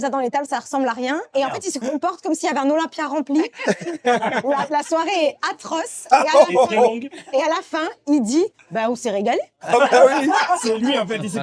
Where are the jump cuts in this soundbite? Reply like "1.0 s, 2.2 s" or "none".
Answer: none